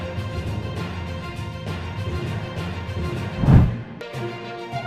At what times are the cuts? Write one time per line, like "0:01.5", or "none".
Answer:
0:03.8